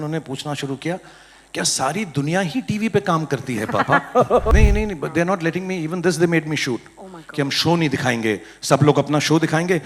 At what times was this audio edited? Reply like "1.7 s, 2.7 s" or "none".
4.5 s